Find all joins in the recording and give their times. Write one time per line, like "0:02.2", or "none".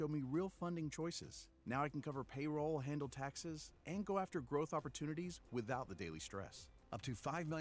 none